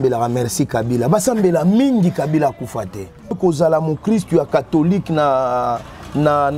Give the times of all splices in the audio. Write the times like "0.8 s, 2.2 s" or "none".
3.3 s